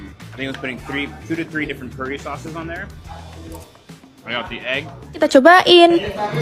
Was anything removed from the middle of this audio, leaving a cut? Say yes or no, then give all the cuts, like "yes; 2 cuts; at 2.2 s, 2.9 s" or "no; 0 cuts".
yes; 1 cut; at 5.2 s